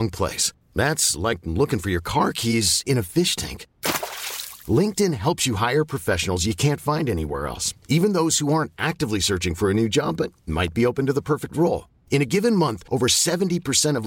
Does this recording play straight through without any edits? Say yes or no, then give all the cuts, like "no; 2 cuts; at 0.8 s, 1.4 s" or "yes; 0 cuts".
yes; 0 cuts